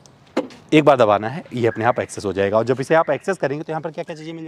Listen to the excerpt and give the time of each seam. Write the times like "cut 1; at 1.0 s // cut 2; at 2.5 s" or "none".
none